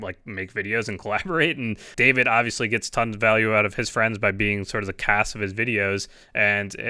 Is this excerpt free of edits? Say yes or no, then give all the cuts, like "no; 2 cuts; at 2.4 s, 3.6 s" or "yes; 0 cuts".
no; 1 cut; at 1.9 s